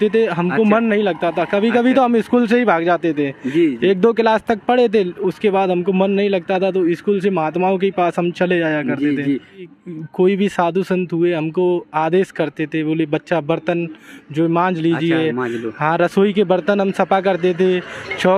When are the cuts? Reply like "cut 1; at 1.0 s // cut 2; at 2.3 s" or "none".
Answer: cut 1; at 9.6 s